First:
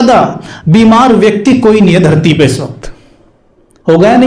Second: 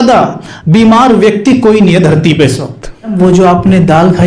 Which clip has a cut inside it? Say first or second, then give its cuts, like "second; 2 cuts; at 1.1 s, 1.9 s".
second; 1 cut; at 3.1 s